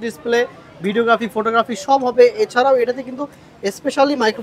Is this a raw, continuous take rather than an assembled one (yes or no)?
yes